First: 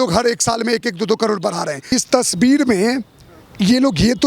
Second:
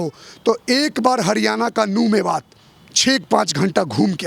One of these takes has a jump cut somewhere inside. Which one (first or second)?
first